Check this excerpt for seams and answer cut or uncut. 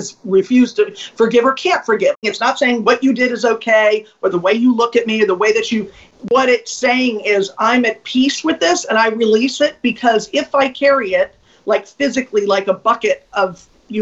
cut